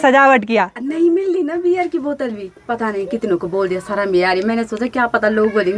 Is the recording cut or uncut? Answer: uncut